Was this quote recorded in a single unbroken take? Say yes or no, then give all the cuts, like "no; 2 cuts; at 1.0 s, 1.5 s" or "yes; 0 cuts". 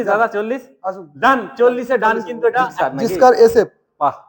no; 1 cut; at 2.7 s